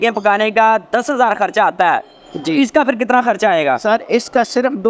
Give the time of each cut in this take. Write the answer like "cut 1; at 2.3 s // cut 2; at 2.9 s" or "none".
none